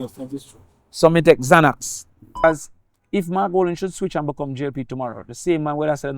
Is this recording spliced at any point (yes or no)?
yes